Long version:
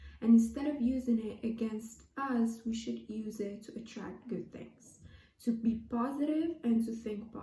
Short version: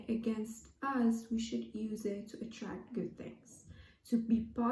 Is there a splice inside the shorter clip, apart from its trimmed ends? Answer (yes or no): no